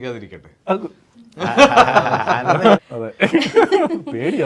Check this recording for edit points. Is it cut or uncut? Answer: uncut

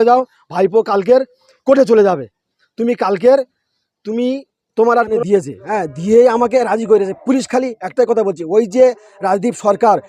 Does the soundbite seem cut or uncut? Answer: cut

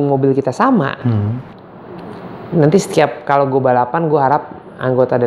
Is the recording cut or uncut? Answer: uncut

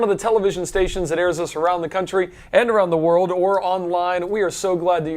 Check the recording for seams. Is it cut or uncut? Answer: cut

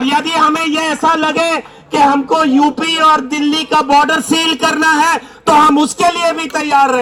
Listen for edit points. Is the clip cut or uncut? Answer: uncut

